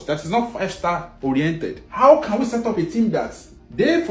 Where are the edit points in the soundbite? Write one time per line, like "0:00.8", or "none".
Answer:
none